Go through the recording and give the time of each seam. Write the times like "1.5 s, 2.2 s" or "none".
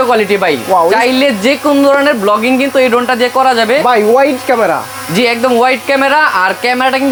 none